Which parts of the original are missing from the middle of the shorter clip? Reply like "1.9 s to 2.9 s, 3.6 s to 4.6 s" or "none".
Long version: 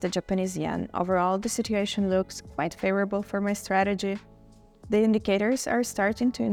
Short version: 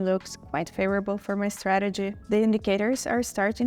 4.2 s to 4.8 s

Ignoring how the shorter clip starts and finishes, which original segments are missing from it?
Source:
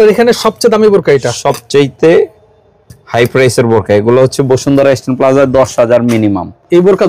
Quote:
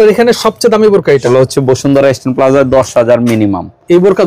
1.2 s to 4.1 s

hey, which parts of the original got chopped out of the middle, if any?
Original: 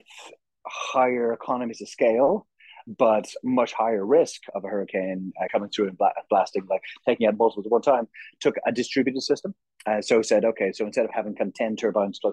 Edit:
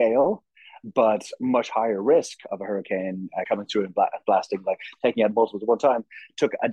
none

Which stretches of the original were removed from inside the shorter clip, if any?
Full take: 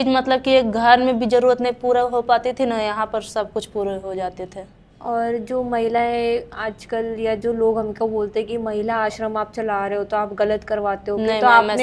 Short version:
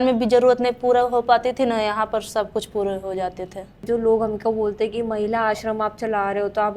4.8 s to 7.4 s

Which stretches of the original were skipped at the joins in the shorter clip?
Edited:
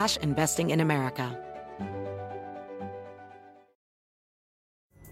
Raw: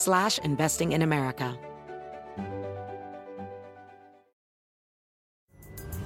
1.5 s to 1.9 s

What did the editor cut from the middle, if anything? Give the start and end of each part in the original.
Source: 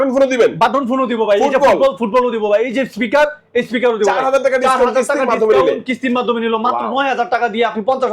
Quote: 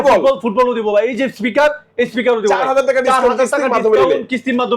none

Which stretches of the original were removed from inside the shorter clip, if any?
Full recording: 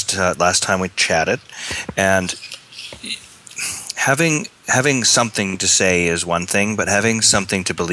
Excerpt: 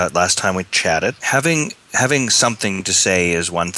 1.5 s to 4.0 s

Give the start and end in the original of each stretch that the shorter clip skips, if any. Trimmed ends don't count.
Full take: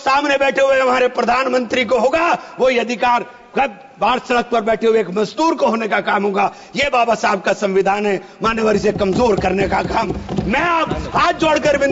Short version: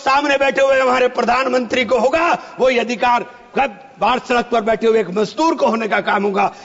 none

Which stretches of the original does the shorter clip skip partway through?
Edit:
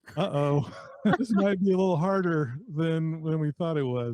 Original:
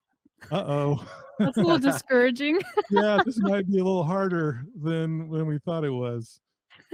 1.5 s to 3.2 s

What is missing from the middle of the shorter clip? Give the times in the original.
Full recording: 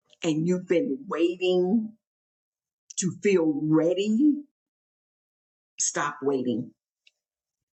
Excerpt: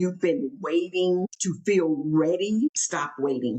1.7 s to 2.8 s, 4.2 s to 5.7 s

